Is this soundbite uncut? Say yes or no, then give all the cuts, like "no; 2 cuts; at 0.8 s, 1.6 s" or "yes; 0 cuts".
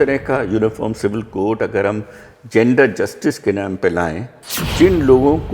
no; 1 cut; at 4.6 s